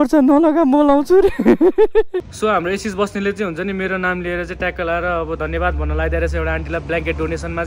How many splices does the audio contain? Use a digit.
1